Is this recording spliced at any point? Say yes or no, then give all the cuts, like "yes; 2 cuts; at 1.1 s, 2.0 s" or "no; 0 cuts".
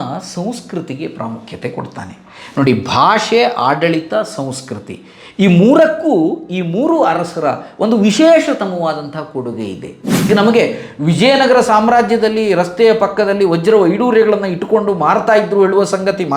yes; 1 cut; at 10.3 s